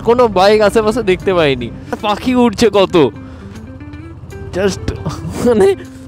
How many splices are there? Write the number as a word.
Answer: one